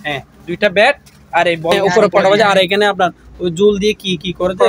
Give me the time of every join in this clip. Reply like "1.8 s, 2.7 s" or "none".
1.8 s